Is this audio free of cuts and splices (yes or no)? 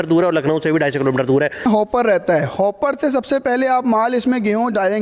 no